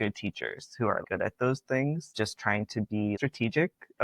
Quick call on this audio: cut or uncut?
cut